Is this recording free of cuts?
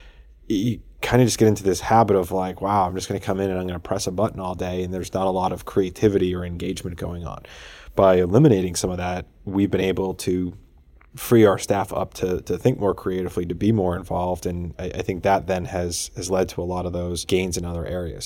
no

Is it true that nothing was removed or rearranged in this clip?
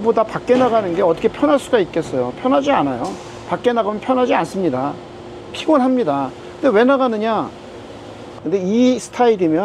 no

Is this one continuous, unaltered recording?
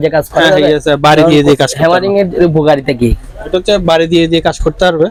yes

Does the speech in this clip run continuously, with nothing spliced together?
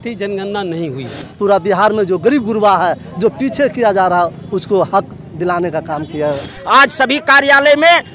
no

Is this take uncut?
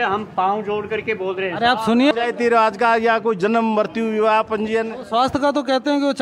no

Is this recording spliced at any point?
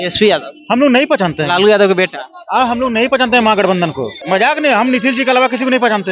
yes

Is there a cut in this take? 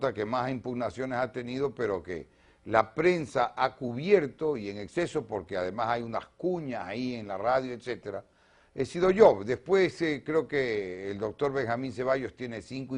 yes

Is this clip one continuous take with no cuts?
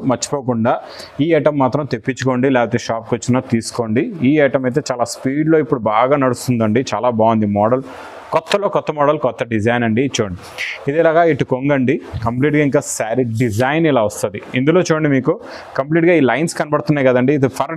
yes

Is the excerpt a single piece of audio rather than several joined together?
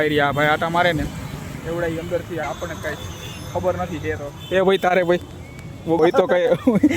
no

